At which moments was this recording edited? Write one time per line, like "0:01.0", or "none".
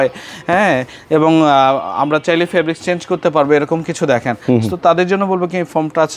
none